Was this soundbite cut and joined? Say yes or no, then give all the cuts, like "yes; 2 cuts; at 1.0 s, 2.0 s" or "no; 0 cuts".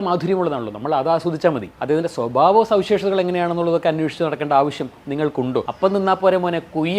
no; 0 cuts